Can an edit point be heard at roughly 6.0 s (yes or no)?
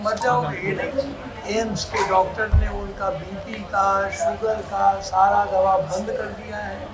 no